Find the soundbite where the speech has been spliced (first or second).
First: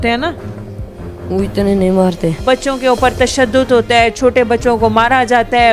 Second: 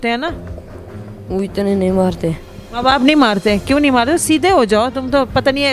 first